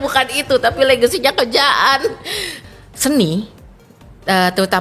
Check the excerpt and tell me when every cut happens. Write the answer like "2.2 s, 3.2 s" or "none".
2.6 s